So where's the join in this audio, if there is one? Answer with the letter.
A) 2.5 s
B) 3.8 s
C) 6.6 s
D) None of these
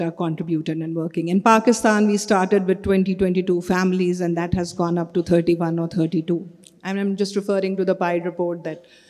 D